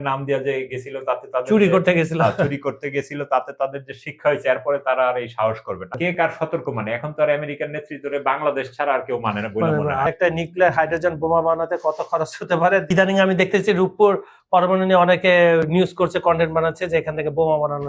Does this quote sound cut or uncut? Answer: cut